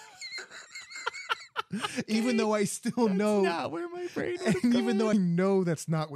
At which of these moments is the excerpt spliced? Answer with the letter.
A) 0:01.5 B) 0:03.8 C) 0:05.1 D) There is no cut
C